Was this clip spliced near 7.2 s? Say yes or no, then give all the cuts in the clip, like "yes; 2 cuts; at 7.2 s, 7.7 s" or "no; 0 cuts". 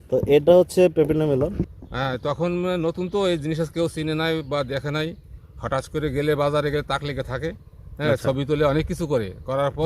no; 1 cut; at 1.6 s